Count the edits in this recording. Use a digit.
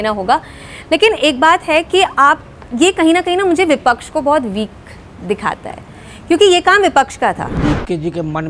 1